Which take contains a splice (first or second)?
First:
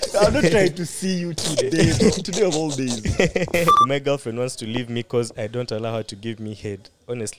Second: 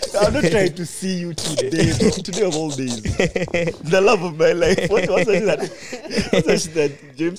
first